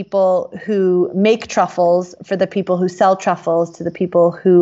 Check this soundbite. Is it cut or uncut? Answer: uncut